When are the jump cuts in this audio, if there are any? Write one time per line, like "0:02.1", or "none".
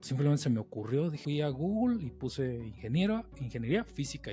0:01.2

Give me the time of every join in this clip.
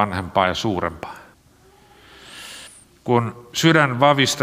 0:01.4

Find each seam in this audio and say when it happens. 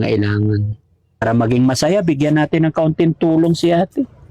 0:01.2

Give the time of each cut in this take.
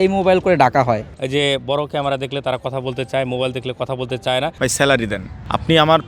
0:01.1
0:04.5

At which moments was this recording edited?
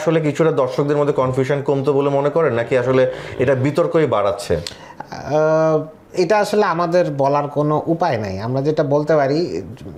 none

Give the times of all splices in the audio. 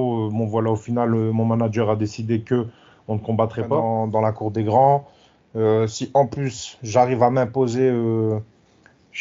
0:03.9

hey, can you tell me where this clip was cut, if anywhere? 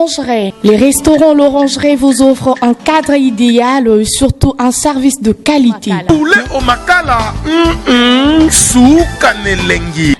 none

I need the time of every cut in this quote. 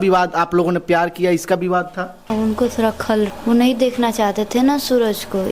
0:02.3
0:03.3

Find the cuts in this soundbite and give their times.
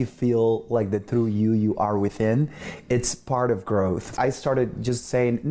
0:04.1

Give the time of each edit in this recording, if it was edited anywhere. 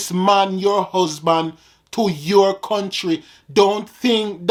none

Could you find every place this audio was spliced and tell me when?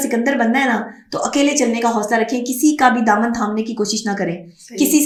none

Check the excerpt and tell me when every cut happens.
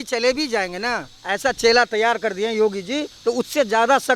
none

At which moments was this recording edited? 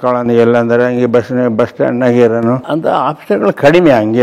0:02.6

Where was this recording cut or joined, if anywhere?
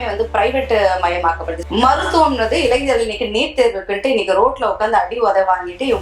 0:01.6

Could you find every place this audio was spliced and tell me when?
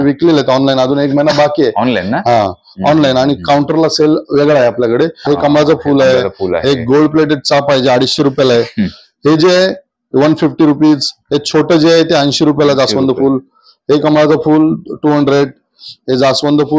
0:05.3

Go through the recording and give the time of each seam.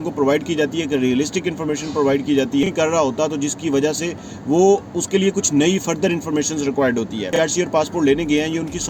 0:02.6
0:07.3

